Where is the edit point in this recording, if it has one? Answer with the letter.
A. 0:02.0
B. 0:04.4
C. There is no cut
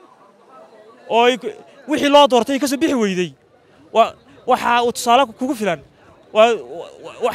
C